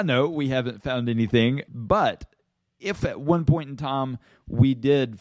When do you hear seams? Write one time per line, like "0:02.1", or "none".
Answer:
0:01.6
0:03.0